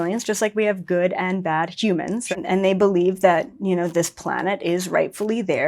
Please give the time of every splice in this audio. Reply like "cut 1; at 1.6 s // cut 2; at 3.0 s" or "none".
cut 1; at 2.2 s